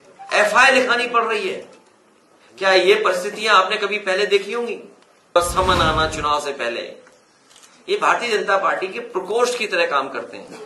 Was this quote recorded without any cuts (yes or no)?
no